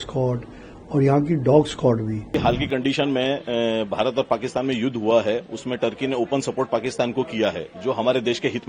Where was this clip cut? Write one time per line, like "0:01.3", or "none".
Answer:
0:02.4